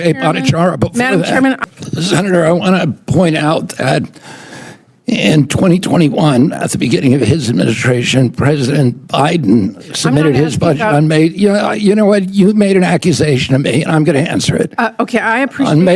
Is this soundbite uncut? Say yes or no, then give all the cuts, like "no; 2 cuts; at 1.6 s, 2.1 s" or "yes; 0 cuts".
no; 1 cut; at 1.6 s